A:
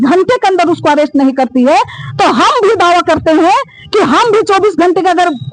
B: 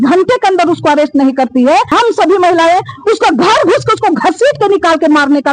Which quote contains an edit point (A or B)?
B